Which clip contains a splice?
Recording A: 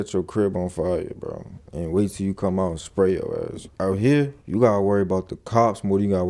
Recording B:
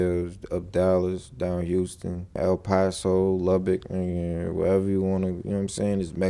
A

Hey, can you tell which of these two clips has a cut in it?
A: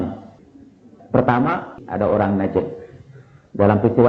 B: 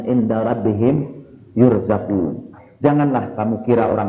A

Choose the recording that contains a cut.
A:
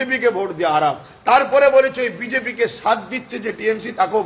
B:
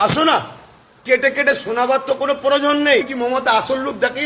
B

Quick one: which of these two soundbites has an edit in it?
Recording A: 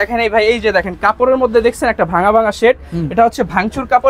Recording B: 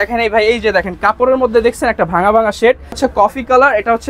B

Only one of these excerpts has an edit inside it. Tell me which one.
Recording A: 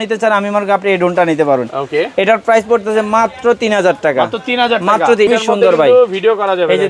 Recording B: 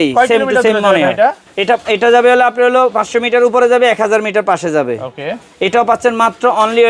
A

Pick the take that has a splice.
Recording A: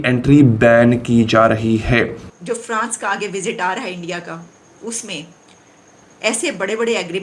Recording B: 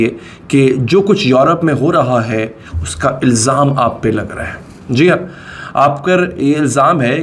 A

